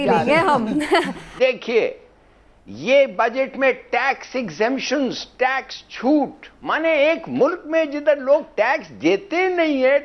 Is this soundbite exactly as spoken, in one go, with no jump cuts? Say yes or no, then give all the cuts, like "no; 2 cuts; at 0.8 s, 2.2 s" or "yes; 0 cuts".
no; 1 cut; at 1.2 s